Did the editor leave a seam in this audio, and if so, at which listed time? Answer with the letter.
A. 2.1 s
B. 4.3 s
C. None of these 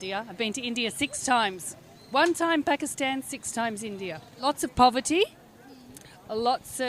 B